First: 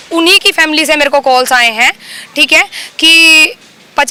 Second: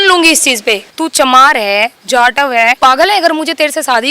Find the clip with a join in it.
second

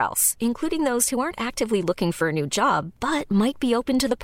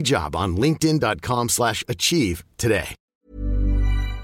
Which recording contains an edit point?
second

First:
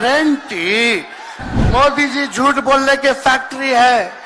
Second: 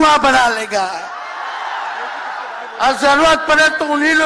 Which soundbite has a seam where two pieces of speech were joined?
first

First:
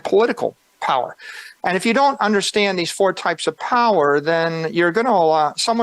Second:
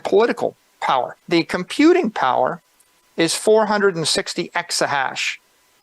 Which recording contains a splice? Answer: second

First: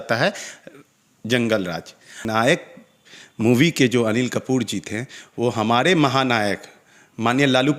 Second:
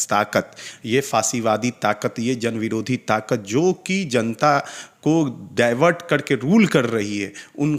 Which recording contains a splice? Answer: first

